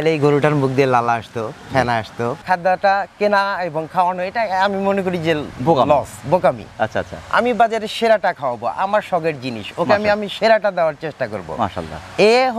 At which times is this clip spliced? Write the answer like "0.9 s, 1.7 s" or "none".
2.4 s